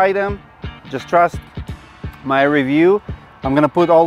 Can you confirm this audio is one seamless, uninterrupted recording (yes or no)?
yes